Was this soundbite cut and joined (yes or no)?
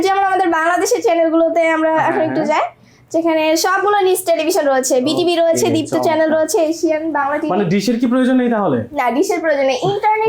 no